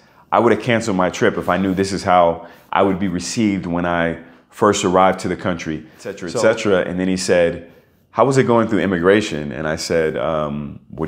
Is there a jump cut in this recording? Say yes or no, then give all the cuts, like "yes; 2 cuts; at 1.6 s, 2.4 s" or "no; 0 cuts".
yes; 1 cut; at 6.2 s